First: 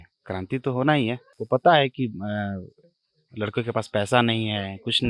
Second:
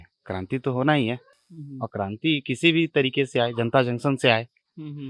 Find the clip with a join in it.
first; 1 cut; at 1.3 s

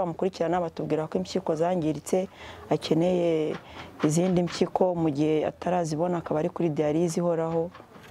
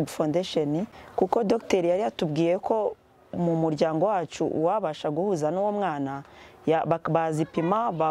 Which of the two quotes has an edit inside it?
second; 1 cut; at 1.0 s

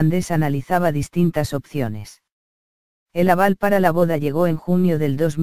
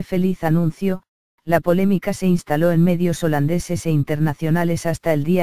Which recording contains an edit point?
second; 1 cut; at 2.3 s

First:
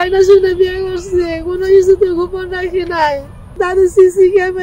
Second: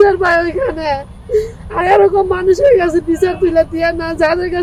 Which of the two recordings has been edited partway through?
first; 1 cut; at 3.6 s

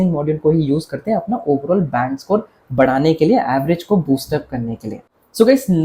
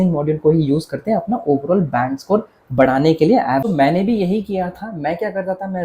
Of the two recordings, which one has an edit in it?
second; 1 cut; at 3.6 s

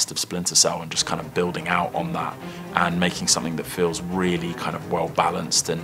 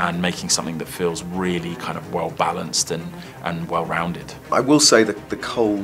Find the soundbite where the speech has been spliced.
second; 1 cut; at 4.3 s

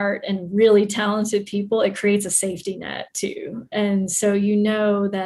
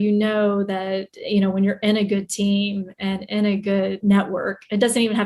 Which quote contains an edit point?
second; 1 cut; at 4.0 s

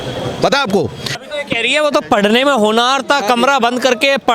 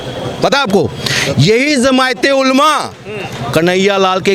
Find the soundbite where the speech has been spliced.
first; 1 cut; at 1.2 s

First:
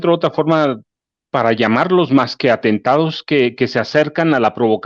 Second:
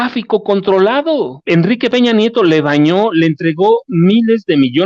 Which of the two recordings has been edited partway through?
second; 1 cut; at 1.4 s

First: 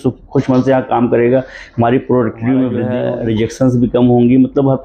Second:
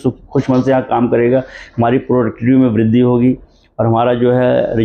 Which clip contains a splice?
first; 1 cut; at 3.0 s

